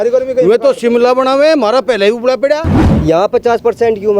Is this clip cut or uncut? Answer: cut